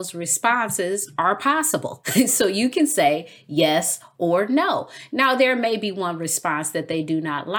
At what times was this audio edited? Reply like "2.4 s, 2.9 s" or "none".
2.0 s

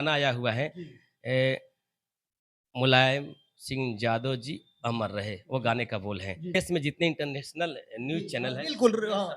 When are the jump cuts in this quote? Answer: 6.6 s

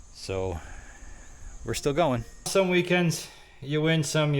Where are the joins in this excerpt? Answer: 2.5 s

